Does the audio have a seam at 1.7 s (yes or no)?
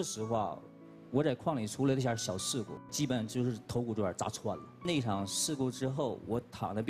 no